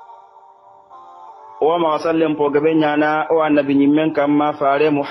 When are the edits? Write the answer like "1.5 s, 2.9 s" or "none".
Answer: none